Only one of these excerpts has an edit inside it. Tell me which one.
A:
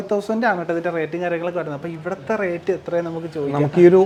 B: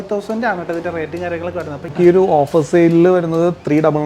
B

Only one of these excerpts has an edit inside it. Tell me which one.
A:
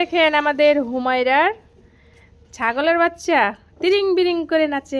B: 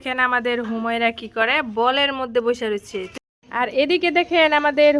B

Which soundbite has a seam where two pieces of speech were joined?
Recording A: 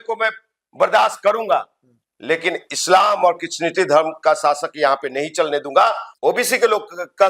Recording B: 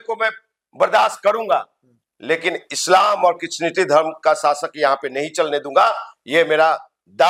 A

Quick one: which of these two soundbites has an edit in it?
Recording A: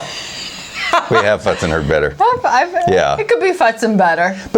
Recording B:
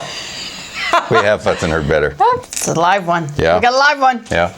B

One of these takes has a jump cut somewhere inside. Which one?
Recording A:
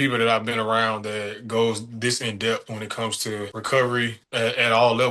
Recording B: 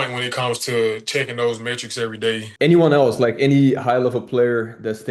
B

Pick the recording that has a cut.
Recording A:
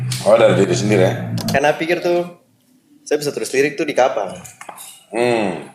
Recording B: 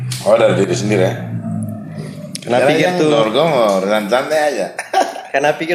A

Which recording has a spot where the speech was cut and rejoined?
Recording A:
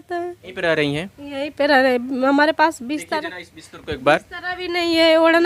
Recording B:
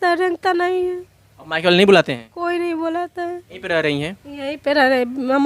B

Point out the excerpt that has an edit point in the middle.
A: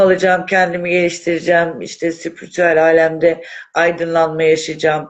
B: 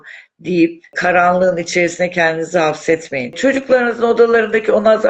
B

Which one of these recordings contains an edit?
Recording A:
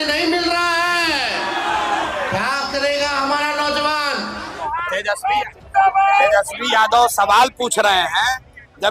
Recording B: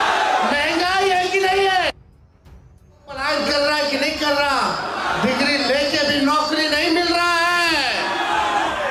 A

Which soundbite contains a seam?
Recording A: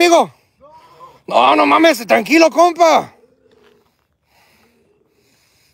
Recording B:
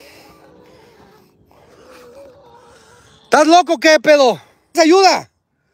B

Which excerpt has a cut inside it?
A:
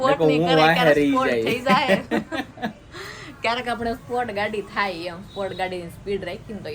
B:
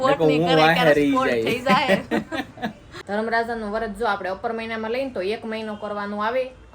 B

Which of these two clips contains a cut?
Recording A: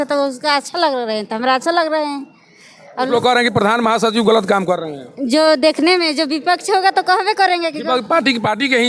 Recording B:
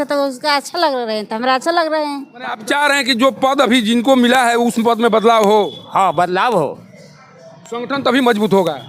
B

